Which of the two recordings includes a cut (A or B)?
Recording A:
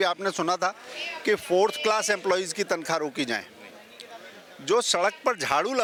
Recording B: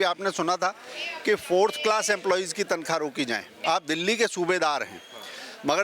B